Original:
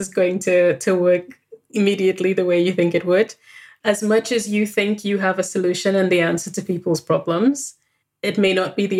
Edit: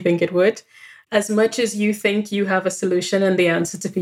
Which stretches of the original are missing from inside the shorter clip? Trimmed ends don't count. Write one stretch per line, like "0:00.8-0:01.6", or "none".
none